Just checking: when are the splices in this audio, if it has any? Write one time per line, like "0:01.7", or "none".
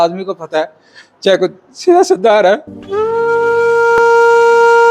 0:02.8